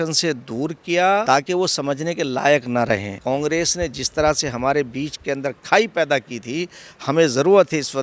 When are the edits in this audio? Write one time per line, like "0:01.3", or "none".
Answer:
0:01.2
0:03.1